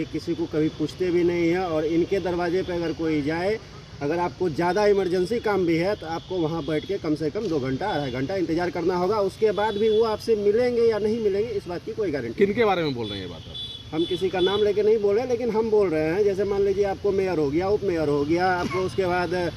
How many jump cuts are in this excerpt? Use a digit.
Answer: 0